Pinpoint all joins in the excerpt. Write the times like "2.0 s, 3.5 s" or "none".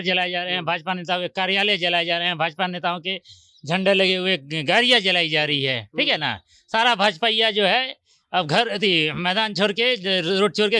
none